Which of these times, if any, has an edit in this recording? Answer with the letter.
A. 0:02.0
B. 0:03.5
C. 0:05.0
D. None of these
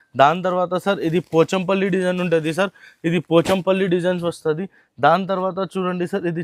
D